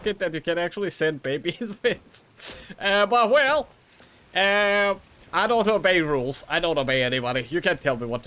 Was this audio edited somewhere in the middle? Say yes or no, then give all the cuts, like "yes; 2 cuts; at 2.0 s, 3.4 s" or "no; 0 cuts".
no; 0 cuts